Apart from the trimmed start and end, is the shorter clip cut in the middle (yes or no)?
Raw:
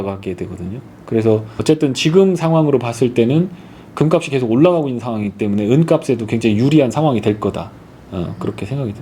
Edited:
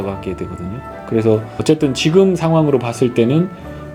no